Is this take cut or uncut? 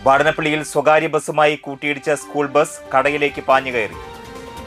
uncut